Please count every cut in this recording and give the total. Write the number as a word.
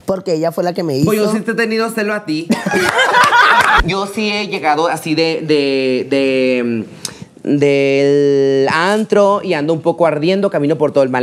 one